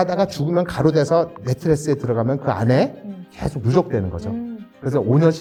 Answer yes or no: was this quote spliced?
no